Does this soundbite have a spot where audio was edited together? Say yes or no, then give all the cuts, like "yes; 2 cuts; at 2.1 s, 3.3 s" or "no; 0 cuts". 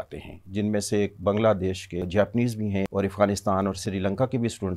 yes; 3 cuts; at 2.0 s, 2.9 s, 3.8 s